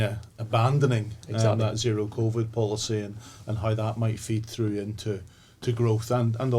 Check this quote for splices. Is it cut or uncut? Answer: uncut